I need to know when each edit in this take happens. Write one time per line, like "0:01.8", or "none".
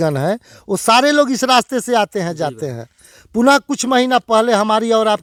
none